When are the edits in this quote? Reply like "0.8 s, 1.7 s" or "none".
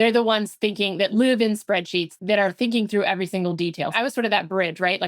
1.1 s, 2.1 s, 3.9 s